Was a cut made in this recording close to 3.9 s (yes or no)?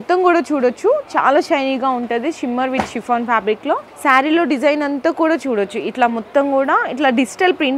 yes